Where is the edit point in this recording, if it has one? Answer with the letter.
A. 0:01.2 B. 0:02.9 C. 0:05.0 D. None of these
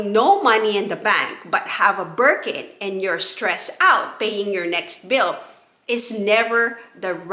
D